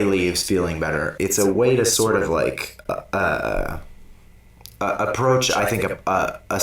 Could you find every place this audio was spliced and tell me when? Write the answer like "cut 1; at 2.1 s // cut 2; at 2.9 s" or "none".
cut 1; at 1.1 s